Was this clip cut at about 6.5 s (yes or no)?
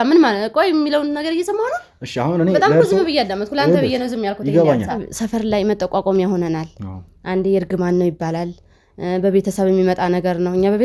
no